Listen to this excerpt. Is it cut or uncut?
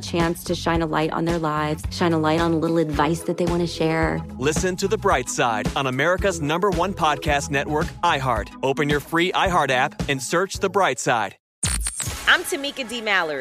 cut